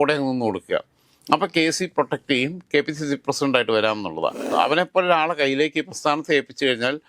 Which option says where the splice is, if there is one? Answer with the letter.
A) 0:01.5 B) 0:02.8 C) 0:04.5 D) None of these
C